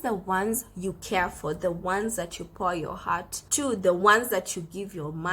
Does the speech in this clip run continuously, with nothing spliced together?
no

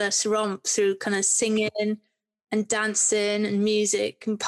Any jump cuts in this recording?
no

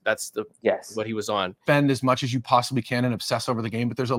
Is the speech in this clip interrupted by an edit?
yes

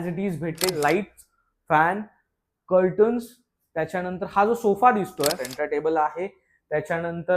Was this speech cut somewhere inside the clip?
yes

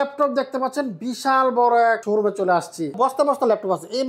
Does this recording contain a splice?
yes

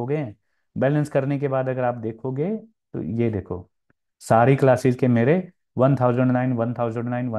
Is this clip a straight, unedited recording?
yes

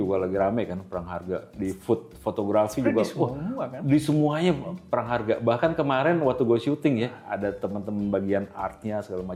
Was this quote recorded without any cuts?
yes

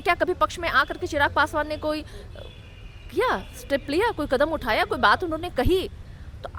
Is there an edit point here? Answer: no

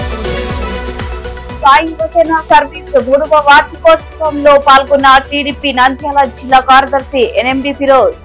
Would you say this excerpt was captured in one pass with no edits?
yes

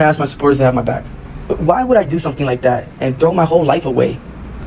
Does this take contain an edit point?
no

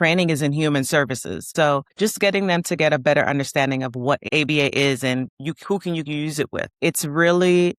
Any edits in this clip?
yes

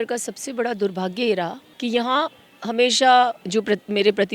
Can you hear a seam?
yes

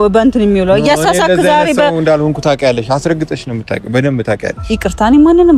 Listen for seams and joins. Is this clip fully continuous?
yes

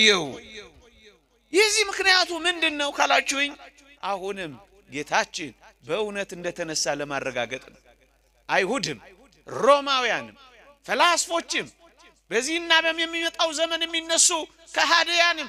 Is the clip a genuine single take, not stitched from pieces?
yes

